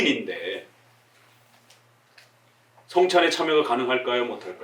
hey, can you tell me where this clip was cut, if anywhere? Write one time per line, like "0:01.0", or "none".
none